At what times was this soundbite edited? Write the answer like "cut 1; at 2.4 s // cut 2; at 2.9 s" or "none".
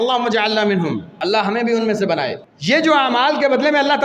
cut 1; at 1.1 s // cut 2; at 2.5 s